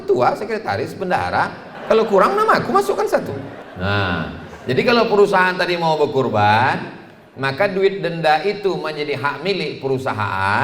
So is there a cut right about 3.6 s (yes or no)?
yes